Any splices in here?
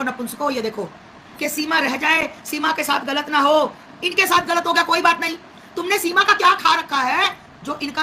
yes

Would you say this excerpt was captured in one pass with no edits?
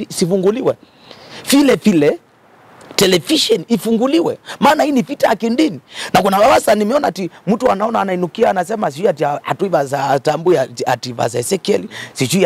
yes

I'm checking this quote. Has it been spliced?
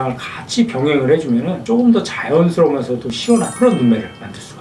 no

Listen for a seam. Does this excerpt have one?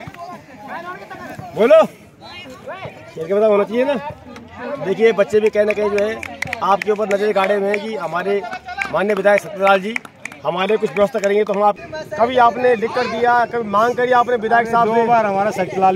yes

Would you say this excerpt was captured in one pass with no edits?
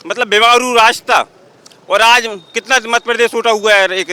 yes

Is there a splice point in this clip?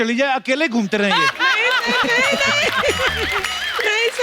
no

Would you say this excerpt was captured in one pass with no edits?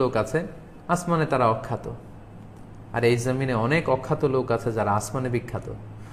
yes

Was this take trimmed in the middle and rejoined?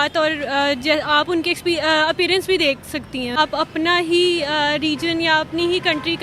yes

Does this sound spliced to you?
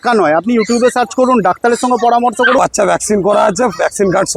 yes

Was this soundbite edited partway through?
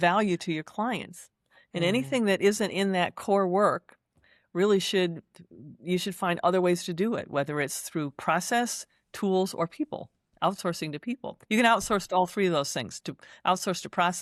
no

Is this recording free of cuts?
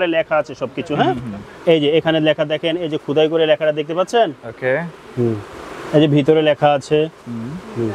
yes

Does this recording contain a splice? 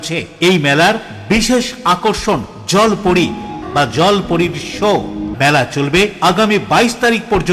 yes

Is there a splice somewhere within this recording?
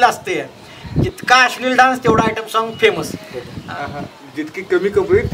no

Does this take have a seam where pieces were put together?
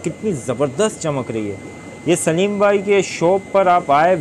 no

